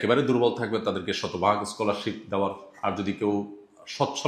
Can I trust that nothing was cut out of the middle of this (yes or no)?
yes